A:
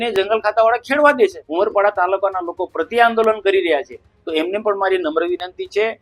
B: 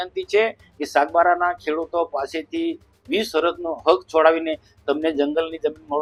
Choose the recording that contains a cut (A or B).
A